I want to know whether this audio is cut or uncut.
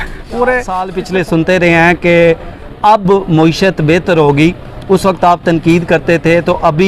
cut